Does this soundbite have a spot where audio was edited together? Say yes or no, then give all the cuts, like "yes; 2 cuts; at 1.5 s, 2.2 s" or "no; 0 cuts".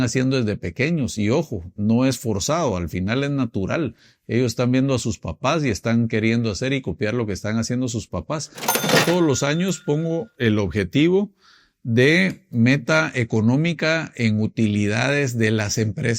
yes; 1 cut; at 8.9 s